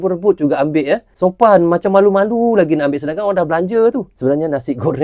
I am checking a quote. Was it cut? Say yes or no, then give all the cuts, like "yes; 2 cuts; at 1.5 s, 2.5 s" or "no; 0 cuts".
yes; 2 cuts; at 1.1 s, 4.1 s